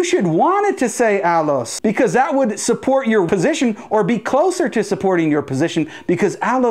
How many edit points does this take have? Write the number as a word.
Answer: one